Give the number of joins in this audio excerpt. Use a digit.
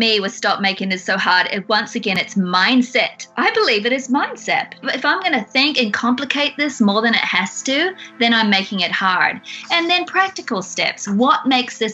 2